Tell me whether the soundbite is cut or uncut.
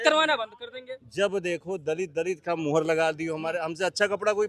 uncut